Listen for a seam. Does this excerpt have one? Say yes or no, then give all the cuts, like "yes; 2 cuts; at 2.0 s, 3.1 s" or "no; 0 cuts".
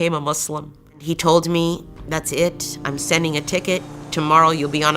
yes; 1 cut; at 1.0 s